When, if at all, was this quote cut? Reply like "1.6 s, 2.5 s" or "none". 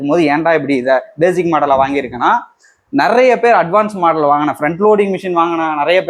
none